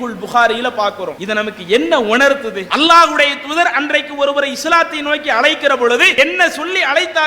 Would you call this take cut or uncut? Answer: cut